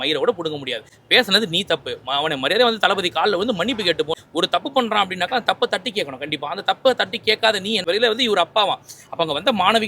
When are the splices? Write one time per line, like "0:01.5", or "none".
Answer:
0:04.2
0:07.8